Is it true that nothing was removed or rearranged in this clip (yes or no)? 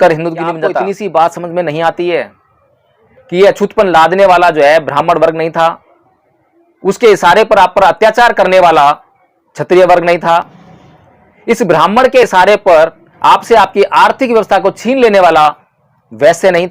no